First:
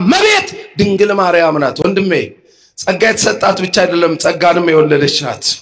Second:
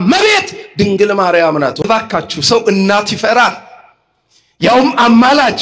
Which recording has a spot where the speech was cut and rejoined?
second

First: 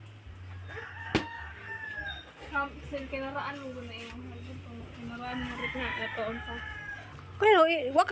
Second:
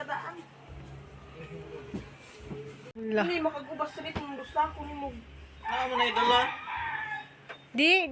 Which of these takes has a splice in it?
second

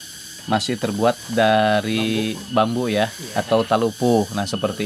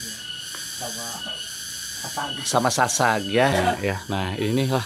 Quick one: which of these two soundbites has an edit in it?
second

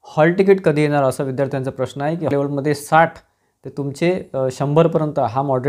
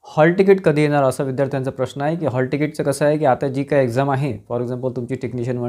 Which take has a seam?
first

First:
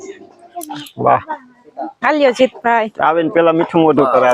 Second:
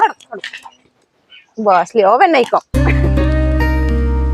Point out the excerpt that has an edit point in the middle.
second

